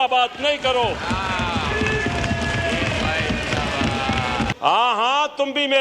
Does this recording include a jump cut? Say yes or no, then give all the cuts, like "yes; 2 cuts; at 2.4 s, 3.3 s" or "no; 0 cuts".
yes; 1 cut; at 4.5 s